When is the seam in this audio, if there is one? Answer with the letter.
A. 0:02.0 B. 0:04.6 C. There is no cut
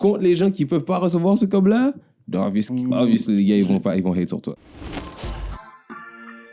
B